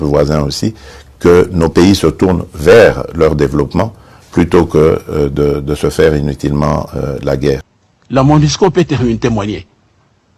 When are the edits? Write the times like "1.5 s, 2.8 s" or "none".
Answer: 7.7 s

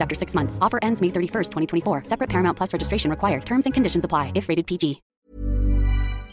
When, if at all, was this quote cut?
5.1 s

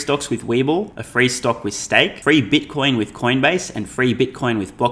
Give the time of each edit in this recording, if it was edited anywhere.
1.0 s, 2.2 s

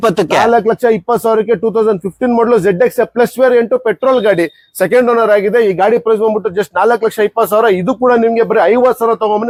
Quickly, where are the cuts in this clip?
none

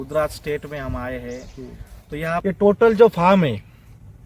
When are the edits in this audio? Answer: 2.4 s

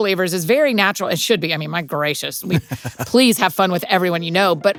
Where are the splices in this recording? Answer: none

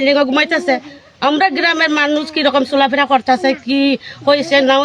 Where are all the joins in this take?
none

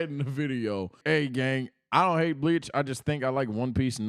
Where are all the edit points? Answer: 1.0 s

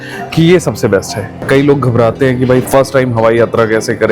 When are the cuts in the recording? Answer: 1.4 s

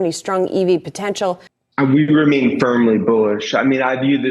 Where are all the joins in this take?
1.5 s

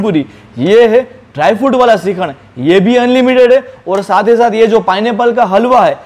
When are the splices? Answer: none

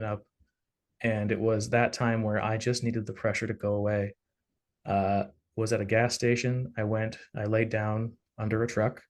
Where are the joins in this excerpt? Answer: 5.4 s

